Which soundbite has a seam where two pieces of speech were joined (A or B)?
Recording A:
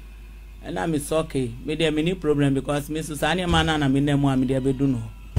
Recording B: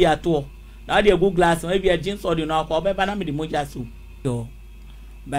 B